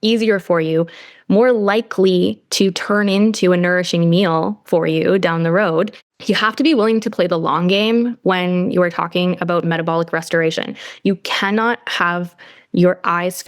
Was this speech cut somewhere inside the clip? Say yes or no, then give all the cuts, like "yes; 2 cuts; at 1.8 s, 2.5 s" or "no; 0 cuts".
yes; 1 cut; at 6.1 s